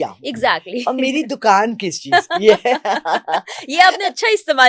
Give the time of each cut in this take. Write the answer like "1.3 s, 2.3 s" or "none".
none

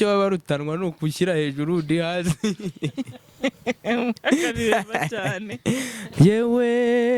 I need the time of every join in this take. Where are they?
6.0 s

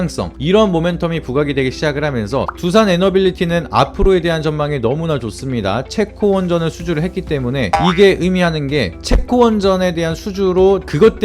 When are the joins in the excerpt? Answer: 2.5 s

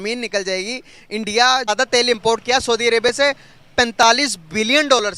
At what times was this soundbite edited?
1.7 s

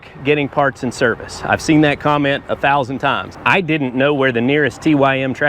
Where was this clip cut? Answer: 3.3 s

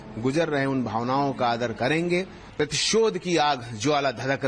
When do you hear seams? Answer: 2.4 s

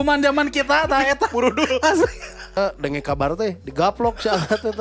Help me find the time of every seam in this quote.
2.6 s

